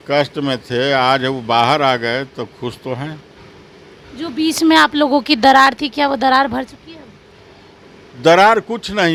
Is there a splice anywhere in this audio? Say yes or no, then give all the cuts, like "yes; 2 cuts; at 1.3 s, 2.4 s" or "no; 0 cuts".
no; 0 cuts